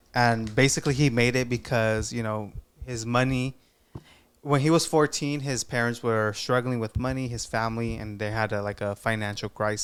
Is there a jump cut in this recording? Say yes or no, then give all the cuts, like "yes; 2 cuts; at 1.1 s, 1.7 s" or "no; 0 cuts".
no; 0 cuts